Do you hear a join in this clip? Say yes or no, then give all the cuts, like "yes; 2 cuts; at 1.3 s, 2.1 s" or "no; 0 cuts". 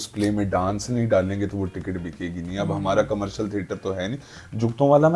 no; 0 cuts